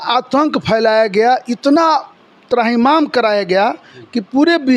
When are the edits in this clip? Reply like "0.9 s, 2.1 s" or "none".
none